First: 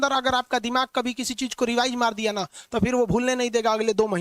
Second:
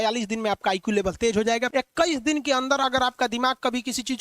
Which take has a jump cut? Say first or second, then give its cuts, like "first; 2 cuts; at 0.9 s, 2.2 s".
second; 1 cut; at 1.7 s